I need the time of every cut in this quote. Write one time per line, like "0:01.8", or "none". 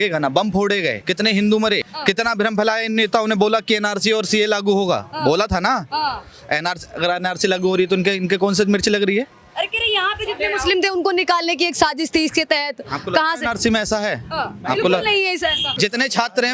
0:01.0
0:01.9
0:15.6